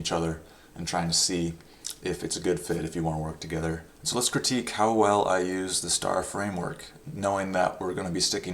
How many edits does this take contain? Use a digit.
1